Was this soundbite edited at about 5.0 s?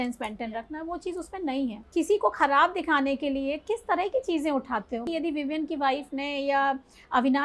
yes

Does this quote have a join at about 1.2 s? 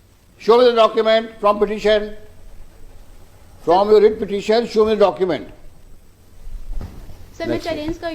no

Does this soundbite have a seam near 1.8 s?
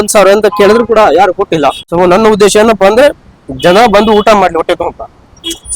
yes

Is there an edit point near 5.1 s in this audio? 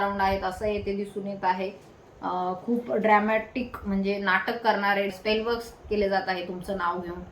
yes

